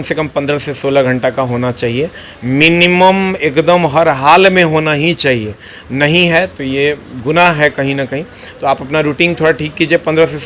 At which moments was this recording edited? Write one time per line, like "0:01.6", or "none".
none